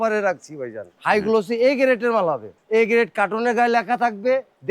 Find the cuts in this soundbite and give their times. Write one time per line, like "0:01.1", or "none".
0:01.0
0:02.5

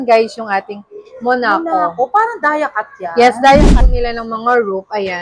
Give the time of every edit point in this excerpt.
0:03.6

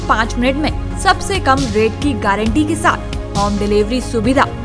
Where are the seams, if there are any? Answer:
none

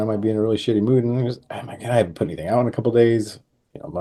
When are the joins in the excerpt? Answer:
none

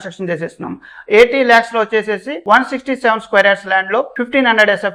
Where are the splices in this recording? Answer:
none

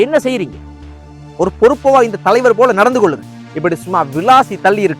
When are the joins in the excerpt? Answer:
none

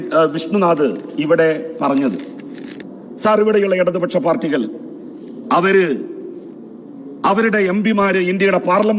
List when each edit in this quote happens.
0:02.8

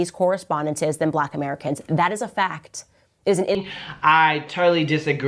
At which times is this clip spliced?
0:03.5

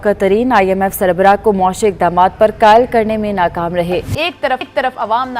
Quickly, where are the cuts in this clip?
0:04.0

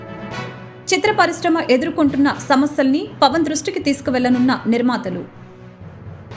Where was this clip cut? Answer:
none

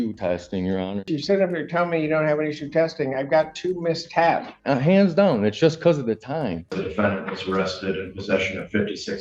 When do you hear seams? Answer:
0:01.1
0:04.5
0:06.8

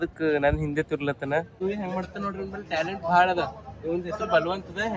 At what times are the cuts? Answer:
0:01.5

